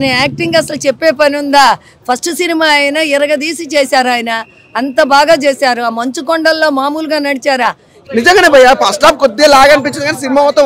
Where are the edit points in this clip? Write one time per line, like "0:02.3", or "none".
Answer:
0:07.9